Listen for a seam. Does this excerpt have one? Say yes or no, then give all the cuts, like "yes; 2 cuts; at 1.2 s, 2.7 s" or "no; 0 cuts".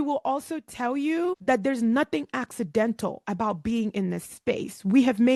no; 0 cuts